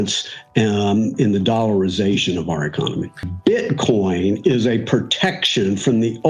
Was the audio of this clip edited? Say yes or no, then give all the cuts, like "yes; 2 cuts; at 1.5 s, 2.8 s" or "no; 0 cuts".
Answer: yes; 1 cut; at 3.2 s